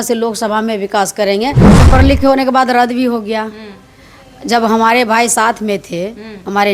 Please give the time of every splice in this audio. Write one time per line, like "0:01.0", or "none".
0:01.8